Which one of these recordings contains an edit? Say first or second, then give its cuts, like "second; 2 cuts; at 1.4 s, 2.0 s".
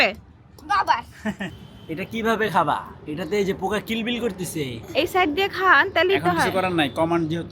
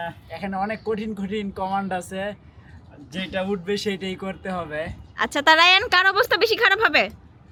first; 1 cut; at 1.5 s